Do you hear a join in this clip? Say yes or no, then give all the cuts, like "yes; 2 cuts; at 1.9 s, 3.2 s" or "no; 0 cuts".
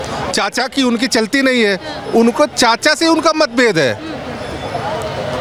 no; 0 cuts